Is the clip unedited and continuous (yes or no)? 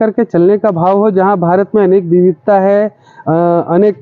yes